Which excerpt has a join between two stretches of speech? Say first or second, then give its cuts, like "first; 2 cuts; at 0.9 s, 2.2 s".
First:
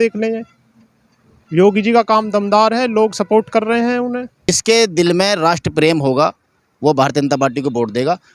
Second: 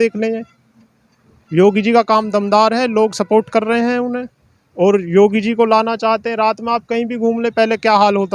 first; 1 cut; at 4.5 s